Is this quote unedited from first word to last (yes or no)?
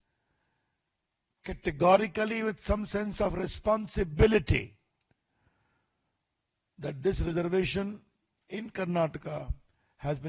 yes